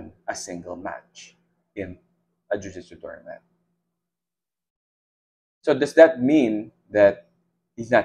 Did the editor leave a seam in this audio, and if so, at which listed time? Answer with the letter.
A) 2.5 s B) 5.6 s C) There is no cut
C